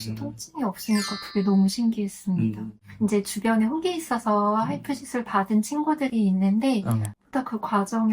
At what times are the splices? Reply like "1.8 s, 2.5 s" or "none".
2.9 s, 7.1 s

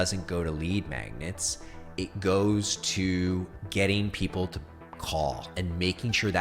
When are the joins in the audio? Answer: 3.6 s

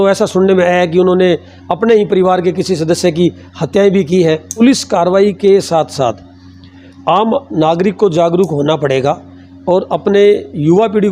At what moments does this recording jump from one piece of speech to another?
4.6 s

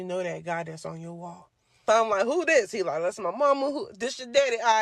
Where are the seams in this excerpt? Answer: 1.7 s

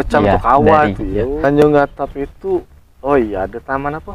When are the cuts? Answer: 1.3 s

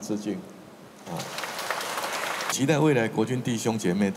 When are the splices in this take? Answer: 2.5 s

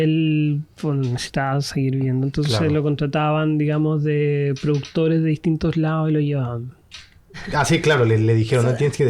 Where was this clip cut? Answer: 7.3 s

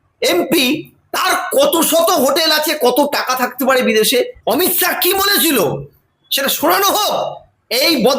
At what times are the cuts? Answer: 4.4 s

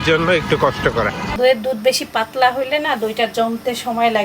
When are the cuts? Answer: 1.2 s

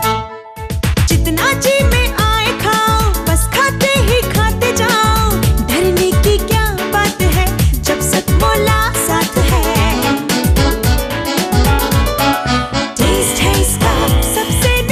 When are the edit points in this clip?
none

